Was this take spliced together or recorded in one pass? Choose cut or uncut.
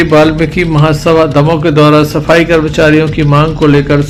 uncut